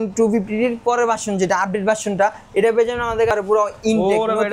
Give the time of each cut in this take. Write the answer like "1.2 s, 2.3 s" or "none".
3.3 s